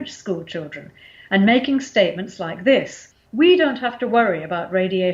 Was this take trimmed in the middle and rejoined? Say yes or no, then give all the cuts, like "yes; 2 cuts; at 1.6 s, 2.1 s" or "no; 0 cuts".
yes; 1 cut; at 3.2 s